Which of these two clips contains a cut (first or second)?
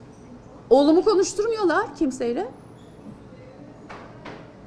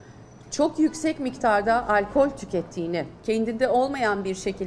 second